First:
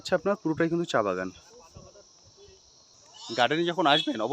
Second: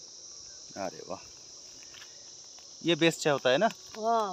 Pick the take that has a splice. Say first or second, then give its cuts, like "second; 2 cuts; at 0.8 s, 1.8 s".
first; 1 cut; at 3.0 s